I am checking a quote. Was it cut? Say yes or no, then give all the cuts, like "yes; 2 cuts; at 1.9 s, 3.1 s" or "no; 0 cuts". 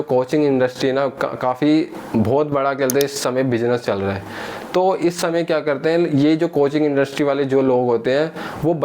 no; 0 cuts